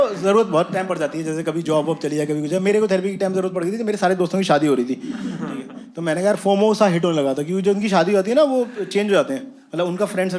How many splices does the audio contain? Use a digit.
0